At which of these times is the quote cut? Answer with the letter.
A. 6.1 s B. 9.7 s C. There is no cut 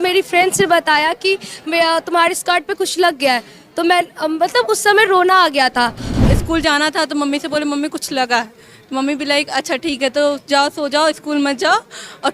A